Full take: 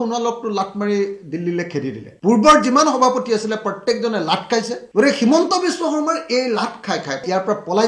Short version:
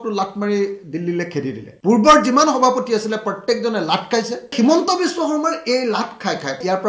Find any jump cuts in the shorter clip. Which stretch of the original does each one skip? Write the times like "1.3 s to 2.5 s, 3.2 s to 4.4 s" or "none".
4.9 s to 5.2 s